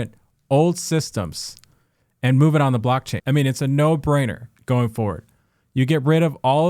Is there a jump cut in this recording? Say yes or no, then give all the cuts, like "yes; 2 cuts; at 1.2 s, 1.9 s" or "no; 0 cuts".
yes; 1 cut; at 3.1 s